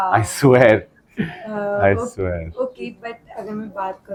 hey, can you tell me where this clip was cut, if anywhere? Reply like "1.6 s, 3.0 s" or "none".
none